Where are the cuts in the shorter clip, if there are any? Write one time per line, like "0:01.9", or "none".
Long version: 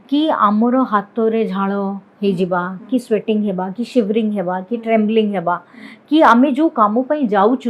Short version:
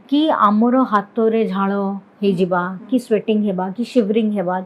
none